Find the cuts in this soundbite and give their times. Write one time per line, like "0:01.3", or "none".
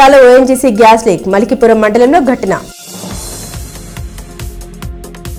none